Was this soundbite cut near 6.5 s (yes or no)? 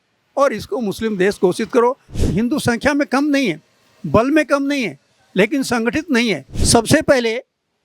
yes